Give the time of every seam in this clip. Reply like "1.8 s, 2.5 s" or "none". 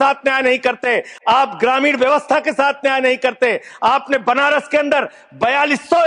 none

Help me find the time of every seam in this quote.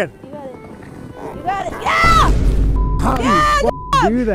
none

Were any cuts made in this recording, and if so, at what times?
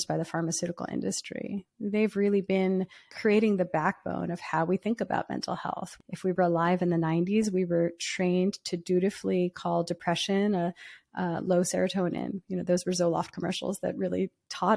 3.0 s, 5.9 s

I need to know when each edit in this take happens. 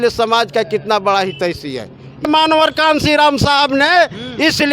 2.3 s

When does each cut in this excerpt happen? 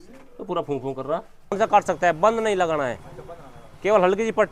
1.6 s

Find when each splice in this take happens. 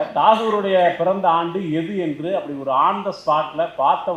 none

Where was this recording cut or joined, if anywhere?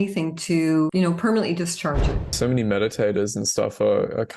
0.9 s, 2.3 s

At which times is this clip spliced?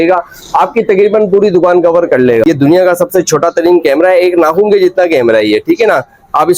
2.4 s

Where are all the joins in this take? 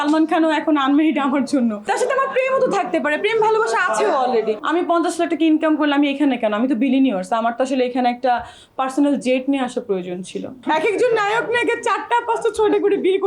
1.9 s, 4.6 s, 10.5 s

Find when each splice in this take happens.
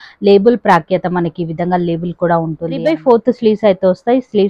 2.8 s

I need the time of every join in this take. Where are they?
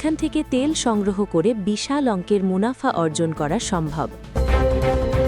4.2 s

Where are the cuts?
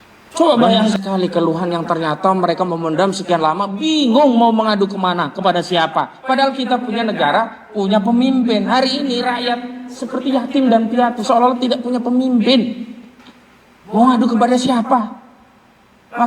0.9 s

